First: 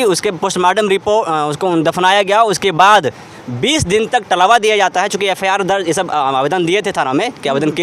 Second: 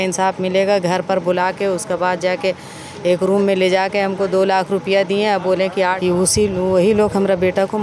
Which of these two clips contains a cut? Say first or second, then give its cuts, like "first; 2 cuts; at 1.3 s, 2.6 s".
second; 1 cut; at 5.7 s